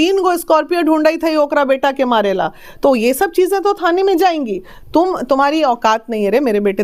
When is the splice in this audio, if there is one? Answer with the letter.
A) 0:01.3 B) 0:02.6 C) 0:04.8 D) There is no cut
D